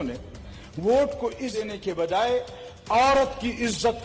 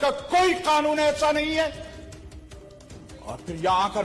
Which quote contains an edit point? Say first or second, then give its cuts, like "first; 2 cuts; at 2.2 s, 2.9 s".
first; 1 cut; at 1.5 s